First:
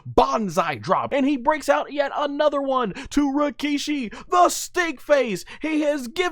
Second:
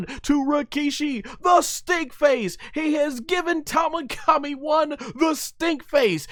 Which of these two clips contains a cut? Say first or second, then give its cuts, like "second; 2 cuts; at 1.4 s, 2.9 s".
first; 1 cut; at 1.1 s